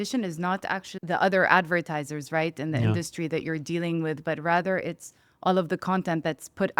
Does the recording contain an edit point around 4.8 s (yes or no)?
no